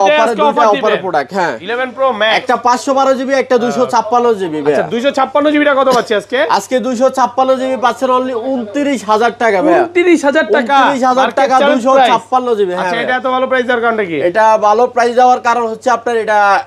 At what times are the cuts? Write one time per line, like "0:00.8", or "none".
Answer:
none